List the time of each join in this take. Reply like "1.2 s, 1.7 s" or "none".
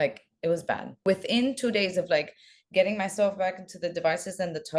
1.0 s